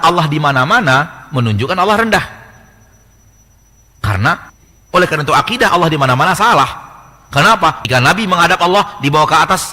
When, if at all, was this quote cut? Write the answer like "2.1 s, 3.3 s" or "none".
4.5 s, 7.8 s